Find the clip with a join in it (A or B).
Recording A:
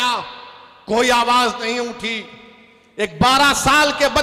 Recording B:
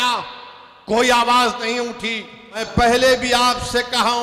B